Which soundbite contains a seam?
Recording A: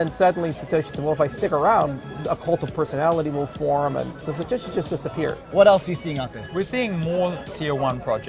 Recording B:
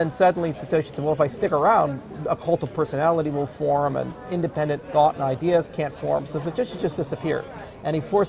A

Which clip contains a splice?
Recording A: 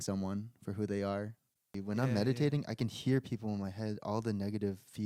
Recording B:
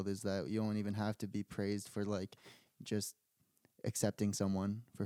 A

